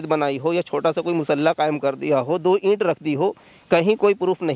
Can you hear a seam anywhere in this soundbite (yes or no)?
no